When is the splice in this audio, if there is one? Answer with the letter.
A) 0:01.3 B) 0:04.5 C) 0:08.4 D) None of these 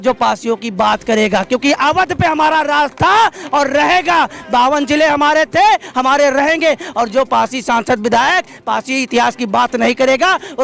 D